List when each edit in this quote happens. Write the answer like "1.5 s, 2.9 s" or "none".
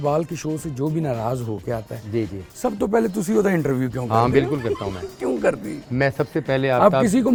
none